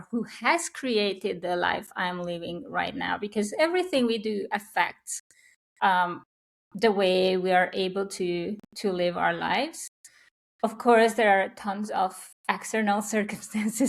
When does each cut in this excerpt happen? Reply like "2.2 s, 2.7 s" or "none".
none